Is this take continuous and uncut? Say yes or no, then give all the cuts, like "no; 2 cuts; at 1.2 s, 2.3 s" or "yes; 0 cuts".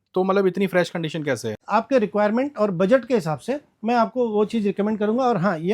no; 1 cut; at 1.5 s